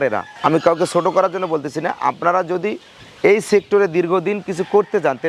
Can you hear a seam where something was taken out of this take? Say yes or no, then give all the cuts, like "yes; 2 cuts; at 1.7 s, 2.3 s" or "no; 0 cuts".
no; 0 cuts